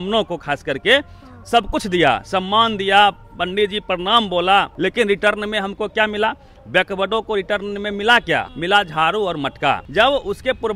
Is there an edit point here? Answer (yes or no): yes